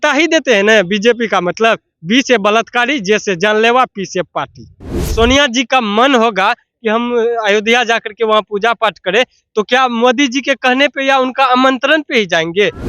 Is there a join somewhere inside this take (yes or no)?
yes